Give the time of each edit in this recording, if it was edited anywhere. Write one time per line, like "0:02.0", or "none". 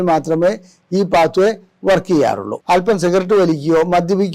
0:02.5